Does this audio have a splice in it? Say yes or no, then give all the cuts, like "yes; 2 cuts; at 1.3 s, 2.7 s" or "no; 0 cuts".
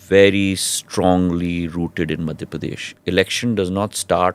yes; 1 cut; at 2.9 s